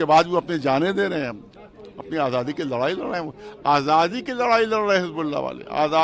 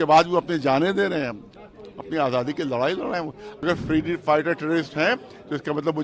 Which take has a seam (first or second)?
second